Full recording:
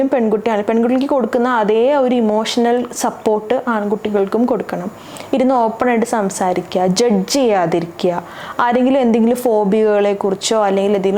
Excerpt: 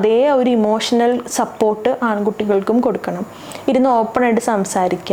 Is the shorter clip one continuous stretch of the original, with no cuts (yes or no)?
yes